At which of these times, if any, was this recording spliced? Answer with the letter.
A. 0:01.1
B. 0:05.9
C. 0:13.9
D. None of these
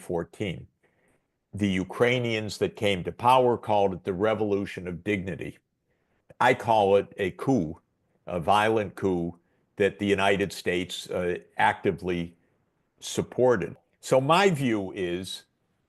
C